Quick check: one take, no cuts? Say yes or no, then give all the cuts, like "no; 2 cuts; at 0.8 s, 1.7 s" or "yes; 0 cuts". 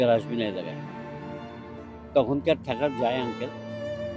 no; 2 cuts; at 0.7 s, 2.1 s